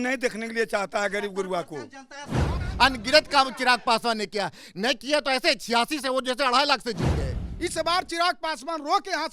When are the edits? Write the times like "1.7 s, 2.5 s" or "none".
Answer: 2.6 s, 7.4 s